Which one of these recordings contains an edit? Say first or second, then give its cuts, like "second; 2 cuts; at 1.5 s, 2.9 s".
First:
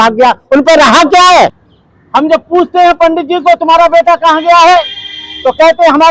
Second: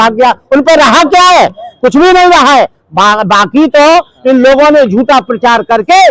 first; 1 cut; at 1.6 s